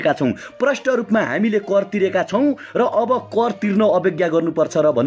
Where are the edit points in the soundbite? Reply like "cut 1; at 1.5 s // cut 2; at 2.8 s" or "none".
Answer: none